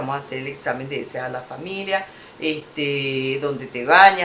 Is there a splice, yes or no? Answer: no